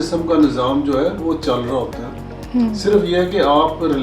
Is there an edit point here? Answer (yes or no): no